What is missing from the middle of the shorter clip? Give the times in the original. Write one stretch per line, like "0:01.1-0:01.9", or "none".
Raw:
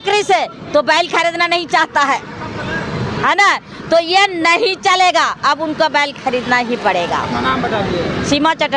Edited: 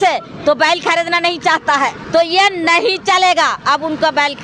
0:02.3-0:03.8